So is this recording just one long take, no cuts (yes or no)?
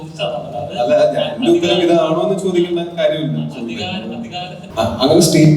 no